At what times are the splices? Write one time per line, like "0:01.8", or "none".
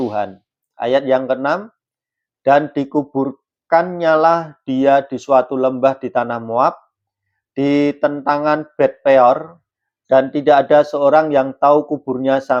none